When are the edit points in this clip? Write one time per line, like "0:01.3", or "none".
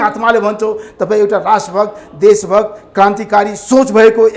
none